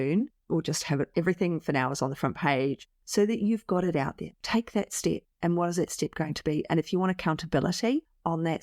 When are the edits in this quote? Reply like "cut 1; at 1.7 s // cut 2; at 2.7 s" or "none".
cut 1; at 2.8 s // cut 2; at 4.3 s